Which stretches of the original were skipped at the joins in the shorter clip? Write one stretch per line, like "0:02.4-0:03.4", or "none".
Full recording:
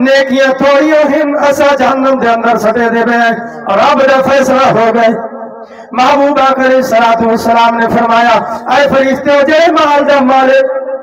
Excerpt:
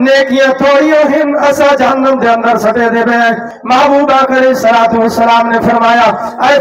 0:03.5-0:05.8